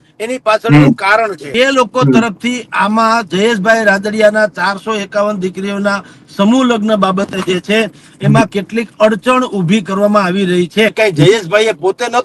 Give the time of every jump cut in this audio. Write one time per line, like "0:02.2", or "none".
0:01.4
0:10.9